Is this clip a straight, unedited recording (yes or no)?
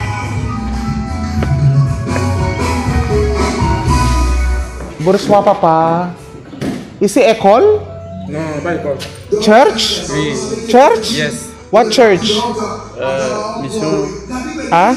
yes